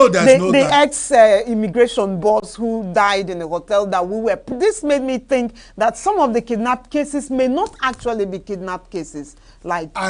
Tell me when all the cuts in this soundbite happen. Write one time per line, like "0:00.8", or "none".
0:04.5